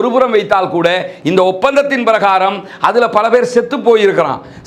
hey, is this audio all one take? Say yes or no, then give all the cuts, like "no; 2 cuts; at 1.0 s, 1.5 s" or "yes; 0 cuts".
yes; 0 cuts